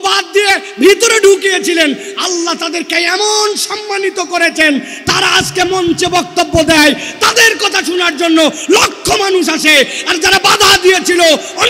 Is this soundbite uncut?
yes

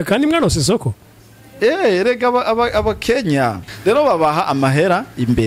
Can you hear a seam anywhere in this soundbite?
yes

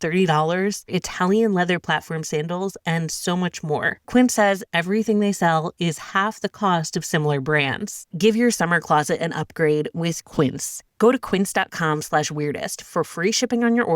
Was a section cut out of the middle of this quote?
yes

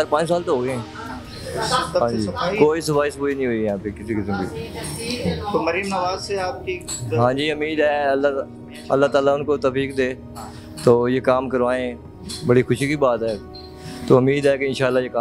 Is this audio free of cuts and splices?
yes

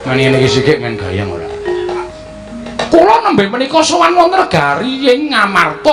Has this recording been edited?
yes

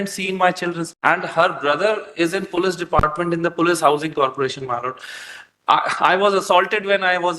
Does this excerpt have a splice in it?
no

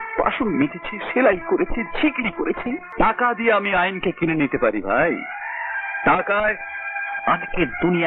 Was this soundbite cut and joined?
yes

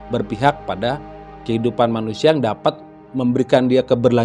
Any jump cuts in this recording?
no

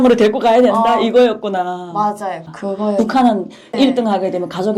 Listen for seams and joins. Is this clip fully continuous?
no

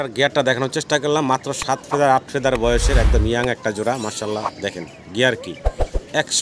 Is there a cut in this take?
no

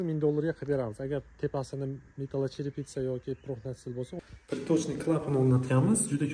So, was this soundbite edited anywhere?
yes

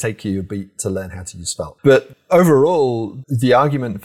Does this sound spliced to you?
yes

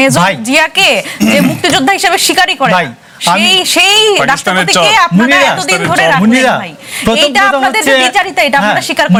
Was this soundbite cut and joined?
no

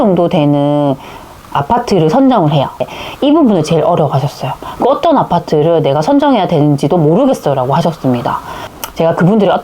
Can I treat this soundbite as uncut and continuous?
no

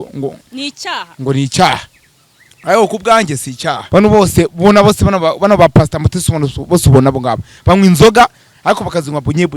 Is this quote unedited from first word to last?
no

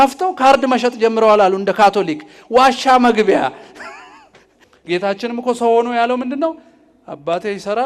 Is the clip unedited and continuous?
yes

